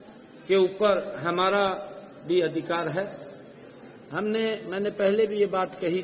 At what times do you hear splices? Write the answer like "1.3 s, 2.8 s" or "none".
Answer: none